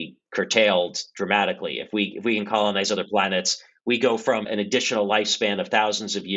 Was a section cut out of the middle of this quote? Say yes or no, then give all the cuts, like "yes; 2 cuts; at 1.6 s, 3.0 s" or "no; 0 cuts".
yes; 1 cut; at 4.5 s